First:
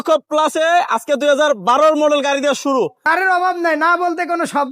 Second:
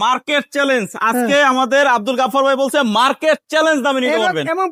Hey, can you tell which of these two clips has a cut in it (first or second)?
first